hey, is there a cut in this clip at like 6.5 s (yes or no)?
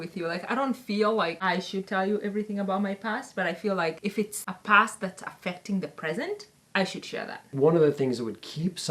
yes